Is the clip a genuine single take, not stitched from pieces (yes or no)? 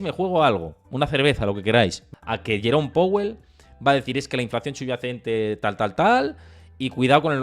no